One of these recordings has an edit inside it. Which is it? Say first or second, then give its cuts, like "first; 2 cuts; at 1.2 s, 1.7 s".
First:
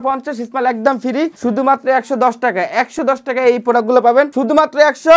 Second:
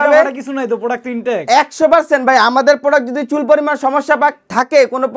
first; 2 cuts; at 1.3 s, 4.4 s